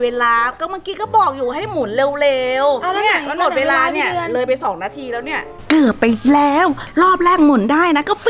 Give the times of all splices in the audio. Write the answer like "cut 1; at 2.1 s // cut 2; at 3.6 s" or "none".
cut 1; at 5.5 s